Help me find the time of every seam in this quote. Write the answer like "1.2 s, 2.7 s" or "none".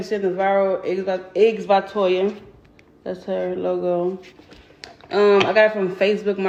none